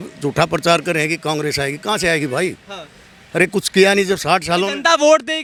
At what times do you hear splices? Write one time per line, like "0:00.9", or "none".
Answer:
none